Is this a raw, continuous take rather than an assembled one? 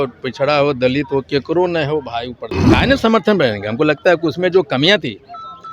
no; 1 cut; at 2.5 s

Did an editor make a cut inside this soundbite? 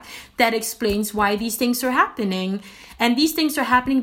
no; 0 cuts

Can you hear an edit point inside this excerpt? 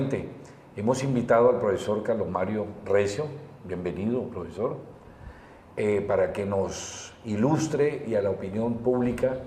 no; 0 cuts

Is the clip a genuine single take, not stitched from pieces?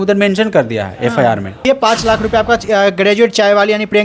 no; 1 cut; at 1.6 s

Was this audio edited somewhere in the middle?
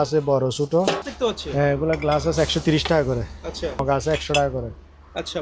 yes; 2 cuts; at 1.1 s, 3.8 s

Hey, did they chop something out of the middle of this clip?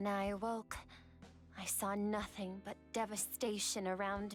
no; 0 cuts

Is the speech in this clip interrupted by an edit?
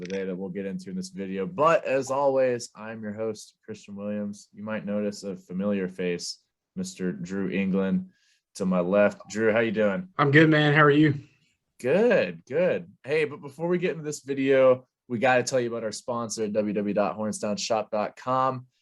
yes; 1 cut; at 10.1 s

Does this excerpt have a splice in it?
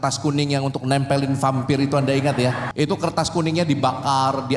yes; 1 cut; at 2.6 s

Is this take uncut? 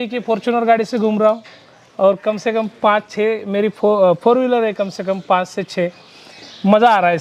yes; 0 cuts

